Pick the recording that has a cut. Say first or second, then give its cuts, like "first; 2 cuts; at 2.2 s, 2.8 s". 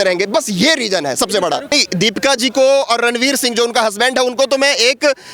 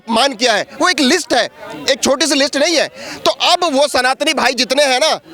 first; 1 cut; at 1.7 s